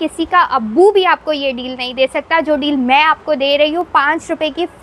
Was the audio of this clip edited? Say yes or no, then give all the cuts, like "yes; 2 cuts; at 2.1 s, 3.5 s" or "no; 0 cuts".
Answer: no; 0 cuts